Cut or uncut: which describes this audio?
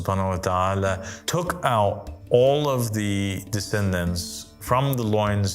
cut